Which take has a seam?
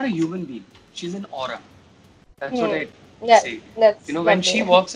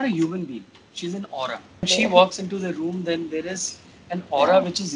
second; 1 cut; at 1.9 s

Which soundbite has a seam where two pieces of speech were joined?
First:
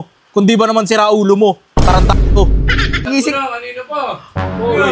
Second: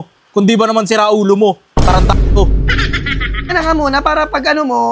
first; 1 cut; at 3.1 s

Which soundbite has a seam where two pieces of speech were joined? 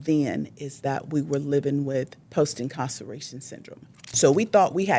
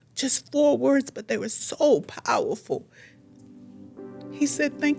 first; 2 cuts; at 2.2 s, 4.1 s

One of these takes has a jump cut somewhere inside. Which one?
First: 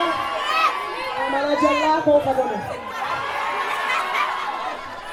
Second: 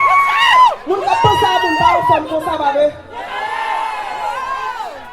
second; 1 cut; at 2.7 s

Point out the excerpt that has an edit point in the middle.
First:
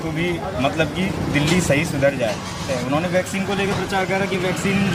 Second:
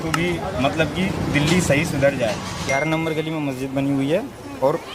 second; 1 cut; at 2.6 s

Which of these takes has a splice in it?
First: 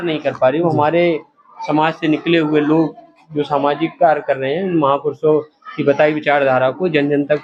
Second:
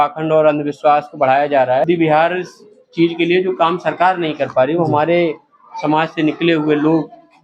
second; 1 cut; at 1.8 s

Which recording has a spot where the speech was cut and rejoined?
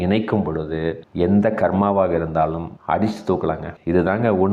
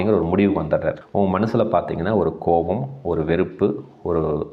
second; 1 cut; at 1.0 s

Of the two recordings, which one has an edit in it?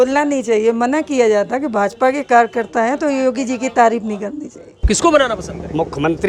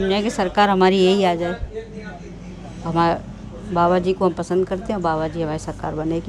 first; 1 cut; at 4.9 s

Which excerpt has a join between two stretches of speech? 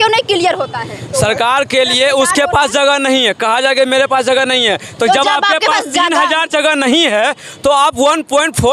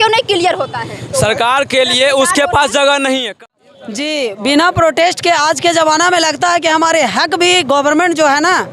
second; 1 cut; at 3.3 s

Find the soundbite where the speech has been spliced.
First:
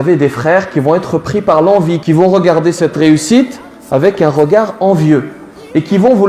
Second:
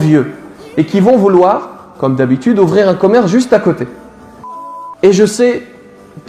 second; 1 cut; at 4.5 s

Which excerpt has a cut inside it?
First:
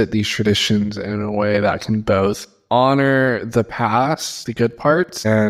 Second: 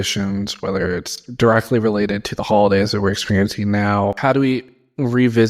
second; 1 cut; at 4.2 s

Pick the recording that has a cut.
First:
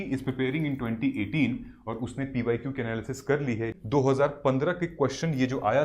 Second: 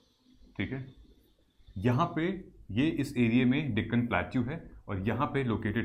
first; 1 cut; at 3.8 s

